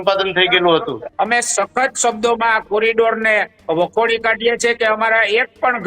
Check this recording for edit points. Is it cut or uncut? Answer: cut